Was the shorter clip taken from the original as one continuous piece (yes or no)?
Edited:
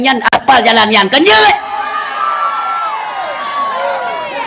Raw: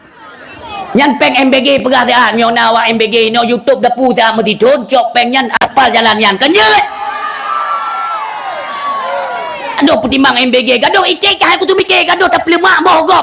yes